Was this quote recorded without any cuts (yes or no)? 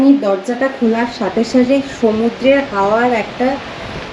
yes